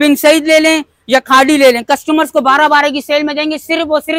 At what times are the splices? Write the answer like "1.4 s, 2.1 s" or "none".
none